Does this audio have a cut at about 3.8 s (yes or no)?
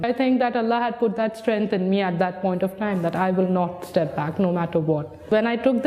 no